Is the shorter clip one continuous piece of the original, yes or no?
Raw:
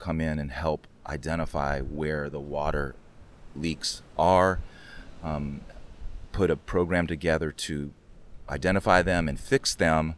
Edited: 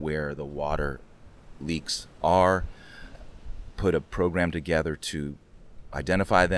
no